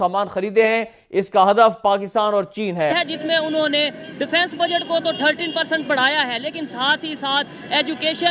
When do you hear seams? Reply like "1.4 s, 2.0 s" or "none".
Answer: 2.9 s